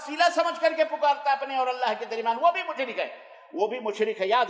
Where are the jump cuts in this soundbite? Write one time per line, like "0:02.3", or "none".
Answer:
none